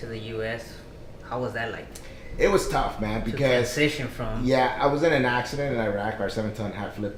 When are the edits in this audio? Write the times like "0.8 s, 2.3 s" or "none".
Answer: none